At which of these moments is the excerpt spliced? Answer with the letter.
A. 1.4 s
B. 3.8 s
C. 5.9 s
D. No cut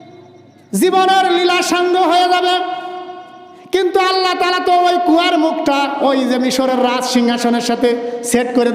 C